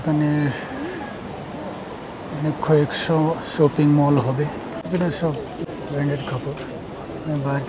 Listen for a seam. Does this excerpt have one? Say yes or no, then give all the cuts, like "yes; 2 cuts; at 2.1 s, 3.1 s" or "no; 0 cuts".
yes; 2 cuts; at 4.8 s, 5.7 s